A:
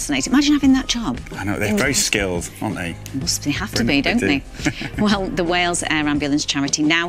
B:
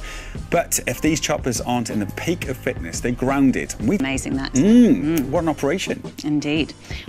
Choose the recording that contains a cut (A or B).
B